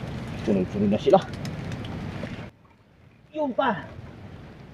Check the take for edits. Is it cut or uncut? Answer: cut